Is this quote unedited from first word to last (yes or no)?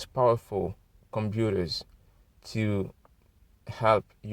yes